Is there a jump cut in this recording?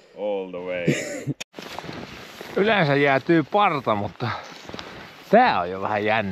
yes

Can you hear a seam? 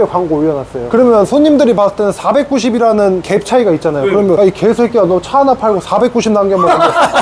no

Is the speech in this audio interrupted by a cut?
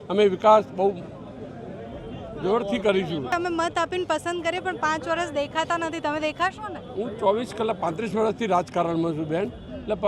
yes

